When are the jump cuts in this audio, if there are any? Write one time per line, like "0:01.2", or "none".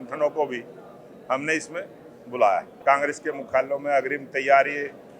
0:02.7